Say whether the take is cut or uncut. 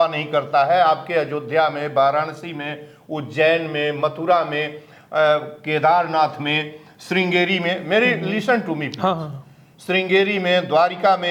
uncut